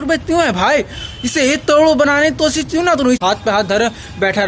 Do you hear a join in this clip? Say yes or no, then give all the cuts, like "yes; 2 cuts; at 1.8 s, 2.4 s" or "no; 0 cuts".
yes; 1 cut; at 3.2 s